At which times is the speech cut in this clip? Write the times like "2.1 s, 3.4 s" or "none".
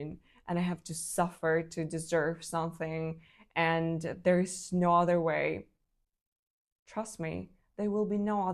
none